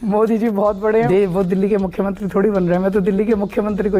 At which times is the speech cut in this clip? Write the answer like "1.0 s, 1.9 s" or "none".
1.1 s

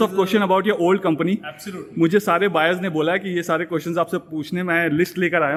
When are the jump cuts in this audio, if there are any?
none

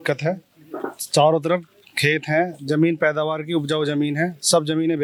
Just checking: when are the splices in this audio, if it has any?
none

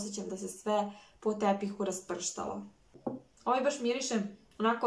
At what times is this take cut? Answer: 2.8 s

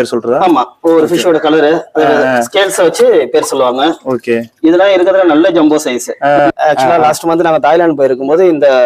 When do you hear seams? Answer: 6.4 s

